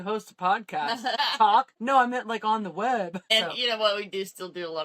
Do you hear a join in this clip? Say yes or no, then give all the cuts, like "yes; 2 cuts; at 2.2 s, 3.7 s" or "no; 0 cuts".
yes; 3 cuts; at 1.1 s, 1.8 s, 3.2 s